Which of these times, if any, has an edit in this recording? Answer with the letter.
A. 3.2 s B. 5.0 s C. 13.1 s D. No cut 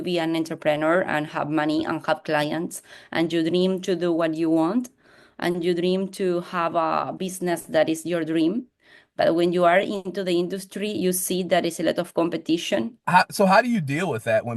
C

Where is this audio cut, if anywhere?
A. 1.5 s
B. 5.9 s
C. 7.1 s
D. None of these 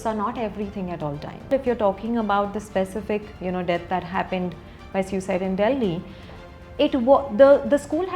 A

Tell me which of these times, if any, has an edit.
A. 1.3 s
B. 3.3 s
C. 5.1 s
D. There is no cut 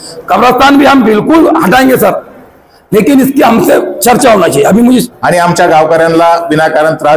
C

